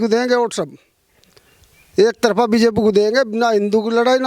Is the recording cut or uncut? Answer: uncut